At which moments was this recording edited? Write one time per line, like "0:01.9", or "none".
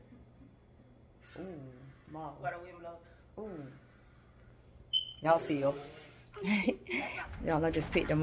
0:07.2